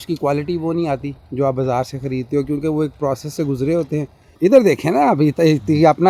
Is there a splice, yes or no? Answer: yes